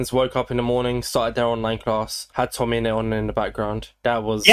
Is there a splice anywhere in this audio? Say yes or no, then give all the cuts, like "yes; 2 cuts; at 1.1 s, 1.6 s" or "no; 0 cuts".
no; 0 cuts